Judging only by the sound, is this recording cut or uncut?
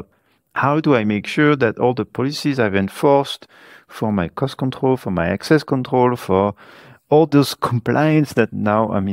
uncut